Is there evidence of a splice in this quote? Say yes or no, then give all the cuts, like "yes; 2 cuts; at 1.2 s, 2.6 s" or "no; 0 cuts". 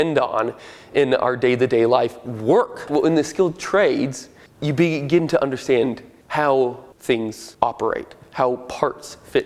yes; 1 cut; at 2.8 s